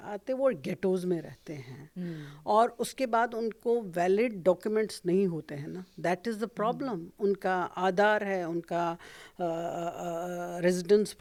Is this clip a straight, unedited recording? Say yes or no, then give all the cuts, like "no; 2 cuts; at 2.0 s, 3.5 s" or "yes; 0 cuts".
yes; 0 cuts